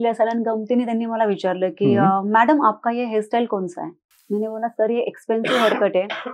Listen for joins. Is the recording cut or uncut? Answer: cut